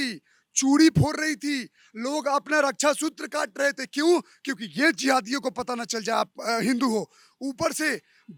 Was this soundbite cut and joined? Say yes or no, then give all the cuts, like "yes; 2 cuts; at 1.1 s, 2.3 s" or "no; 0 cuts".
no; 0 cuts